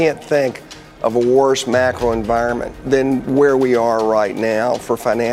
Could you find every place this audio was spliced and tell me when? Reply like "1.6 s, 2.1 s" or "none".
2.8 s